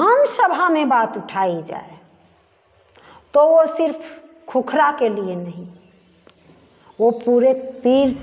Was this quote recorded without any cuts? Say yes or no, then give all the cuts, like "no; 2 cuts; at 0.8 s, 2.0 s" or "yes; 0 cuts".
yes; 0 cuts